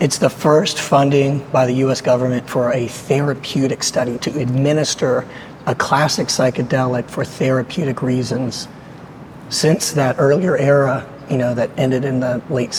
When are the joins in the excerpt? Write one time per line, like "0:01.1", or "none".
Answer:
none